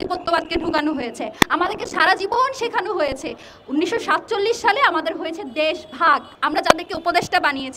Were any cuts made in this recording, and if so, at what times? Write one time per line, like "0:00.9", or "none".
0:06.4

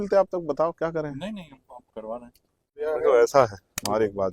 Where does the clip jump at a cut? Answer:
0:02.8

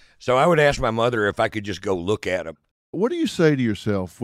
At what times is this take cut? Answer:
0:02.9

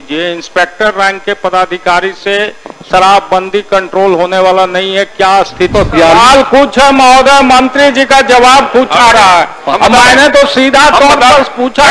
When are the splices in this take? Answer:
0:05.7

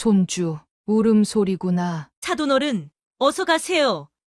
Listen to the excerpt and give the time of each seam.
0:02.1

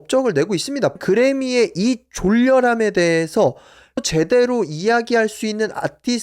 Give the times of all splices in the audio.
0:00.9
0:04.0

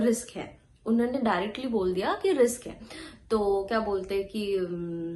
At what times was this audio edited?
none

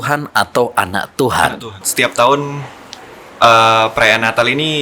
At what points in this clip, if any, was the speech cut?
0:01.8

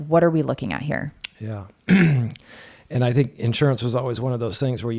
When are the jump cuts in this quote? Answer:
none

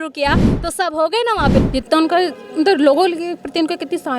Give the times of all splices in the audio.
0:01.6

